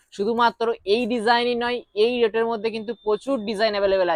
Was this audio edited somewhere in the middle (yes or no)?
no